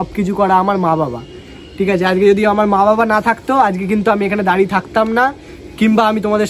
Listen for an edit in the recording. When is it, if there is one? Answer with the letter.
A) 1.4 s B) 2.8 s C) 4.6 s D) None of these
D